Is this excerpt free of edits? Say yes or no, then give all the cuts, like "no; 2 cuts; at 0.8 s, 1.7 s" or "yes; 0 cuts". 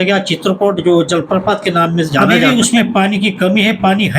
no; 1 cut; at 2.2 s